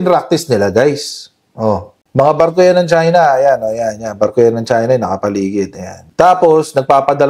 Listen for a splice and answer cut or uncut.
uncut